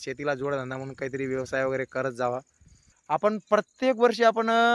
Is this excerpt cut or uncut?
cut